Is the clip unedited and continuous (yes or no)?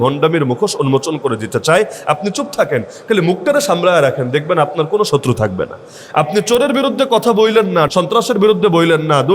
no